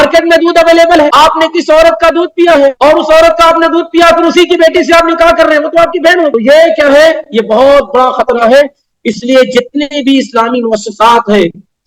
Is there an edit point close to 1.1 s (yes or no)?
yes